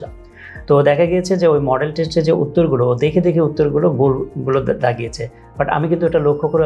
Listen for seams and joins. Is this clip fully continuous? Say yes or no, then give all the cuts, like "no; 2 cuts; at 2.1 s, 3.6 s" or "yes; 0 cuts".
yes; 0 cuts